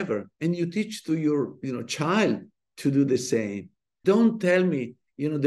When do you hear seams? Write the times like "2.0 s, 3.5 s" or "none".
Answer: 3.9 s